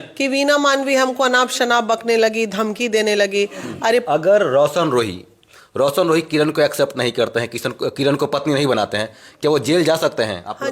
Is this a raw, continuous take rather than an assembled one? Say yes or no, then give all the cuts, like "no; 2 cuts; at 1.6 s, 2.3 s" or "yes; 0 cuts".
no; 1 cut; at 4.0 s